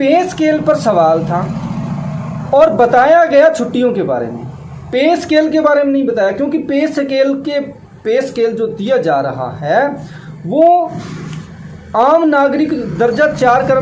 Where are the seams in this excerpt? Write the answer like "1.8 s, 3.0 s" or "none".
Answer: none